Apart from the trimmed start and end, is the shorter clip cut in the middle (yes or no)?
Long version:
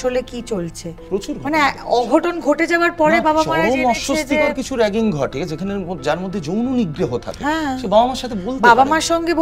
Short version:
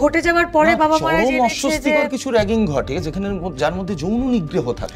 no